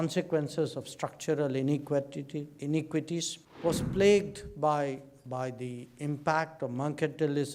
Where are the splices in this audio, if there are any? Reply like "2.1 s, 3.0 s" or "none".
3.4 s